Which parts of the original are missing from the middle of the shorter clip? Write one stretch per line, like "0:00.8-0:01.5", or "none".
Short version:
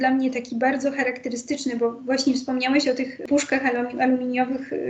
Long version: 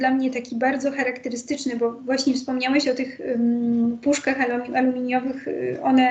0:03.2-0:04.0

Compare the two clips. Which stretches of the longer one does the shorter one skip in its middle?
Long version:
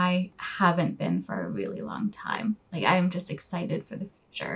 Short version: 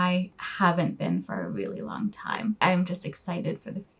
0:02.6-0:02.8

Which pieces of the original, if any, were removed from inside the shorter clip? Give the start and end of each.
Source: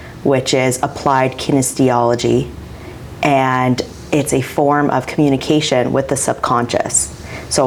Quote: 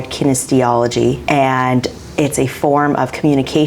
0:02.5-0:03.1

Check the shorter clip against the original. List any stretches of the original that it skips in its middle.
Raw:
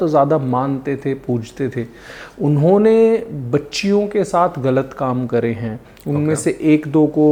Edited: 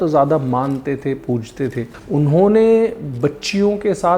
0:02.0-0:02.3

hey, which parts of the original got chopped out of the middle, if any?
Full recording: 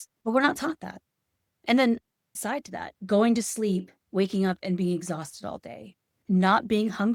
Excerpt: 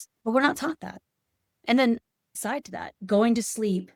none

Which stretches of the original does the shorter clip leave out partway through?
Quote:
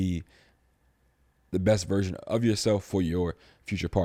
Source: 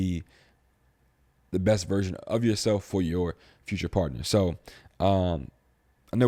none

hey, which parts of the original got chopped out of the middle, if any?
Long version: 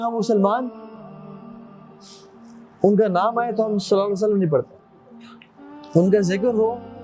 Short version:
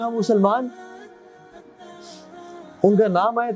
none

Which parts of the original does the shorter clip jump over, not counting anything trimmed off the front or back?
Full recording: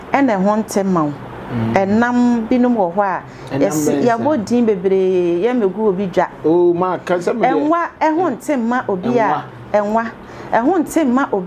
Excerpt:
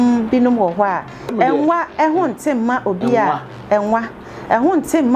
0:03.5-0:07.3

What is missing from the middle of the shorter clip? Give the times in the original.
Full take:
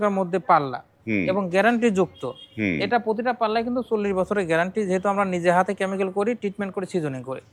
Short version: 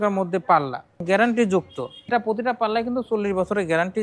0:01.0-0:01.5
0:02.5-0:02.9

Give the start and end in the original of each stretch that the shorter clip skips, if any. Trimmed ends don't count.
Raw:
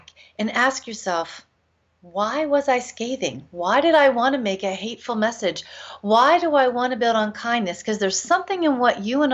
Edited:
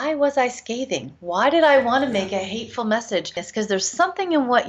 0:05.7-0:07.7

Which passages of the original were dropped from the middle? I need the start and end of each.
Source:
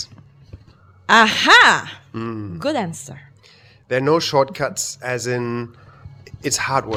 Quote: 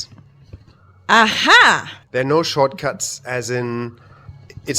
0:01.9-0:03.7

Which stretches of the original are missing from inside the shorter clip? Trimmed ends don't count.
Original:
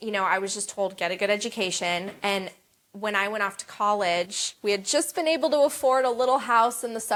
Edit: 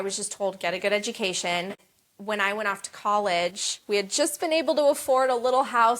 0:02.1-0:02.5

